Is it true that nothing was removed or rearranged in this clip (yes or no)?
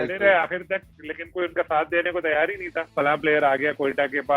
no